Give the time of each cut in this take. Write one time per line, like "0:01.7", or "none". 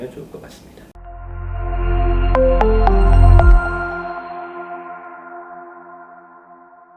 none